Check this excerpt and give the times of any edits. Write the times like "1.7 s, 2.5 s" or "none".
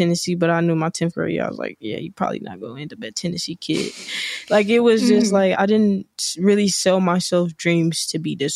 5.5 s